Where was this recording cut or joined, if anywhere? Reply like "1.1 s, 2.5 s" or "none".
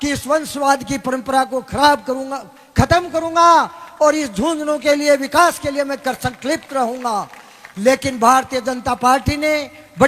none